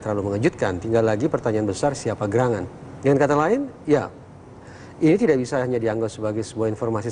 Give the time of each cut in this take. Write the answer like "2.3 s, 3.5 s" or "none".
3.8 s